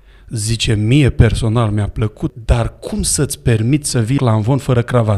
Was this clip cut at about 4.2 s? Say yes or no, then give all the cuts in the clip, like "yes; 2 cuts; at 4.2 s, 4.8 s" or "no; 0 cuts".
yes; 2 cuts; at 2.3 s, 4.2 s